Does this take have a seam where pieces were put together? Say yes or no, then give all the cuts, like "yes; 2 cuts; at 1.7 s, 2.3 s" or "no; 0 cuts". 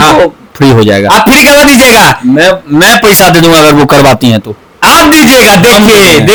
no; 0 cuts